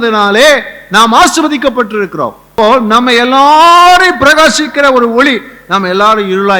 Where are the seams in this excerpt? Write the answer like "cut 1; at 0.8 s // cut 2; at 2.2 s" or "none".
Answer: cut 1; at 2.5 s